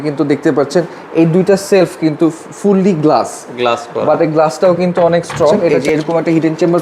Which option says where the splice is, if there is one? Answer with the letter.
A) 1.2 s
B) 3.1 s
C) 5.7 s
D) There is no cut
C